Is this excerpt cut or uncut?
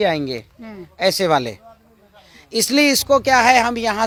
uncut